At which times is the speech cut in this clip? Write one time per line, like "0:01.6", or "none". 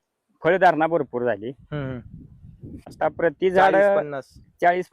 0:02.9